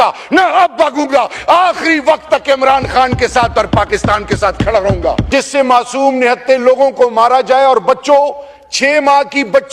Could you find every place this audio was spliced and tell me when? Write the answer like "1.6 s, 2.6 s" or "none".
5.3 s